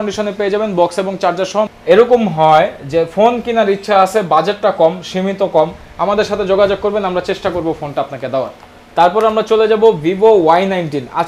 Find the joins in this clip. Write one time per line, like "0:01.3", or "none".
0:01.7
0:08.6